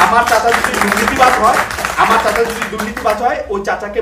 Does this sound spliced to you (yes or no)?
no